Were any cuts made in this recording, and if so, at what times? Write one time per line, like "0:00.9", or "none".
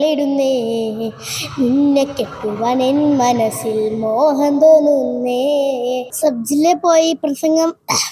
0:06.1